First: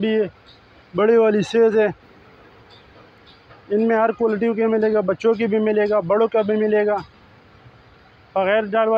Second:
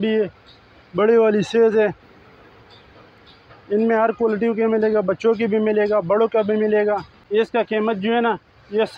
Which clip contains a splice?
second; 1 cut; at 7.1 s

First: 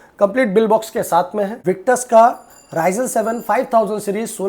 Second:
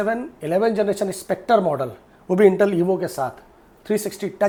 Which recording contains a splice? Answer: first; 1 cut; at 1.5 s

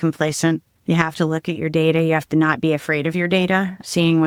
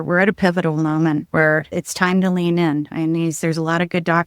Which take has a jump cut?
second; 1 cut; at 1.5 s

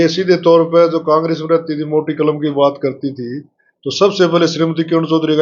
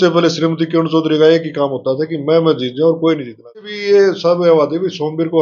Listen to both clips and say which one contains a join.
second; 1 cut; at 3.7 s

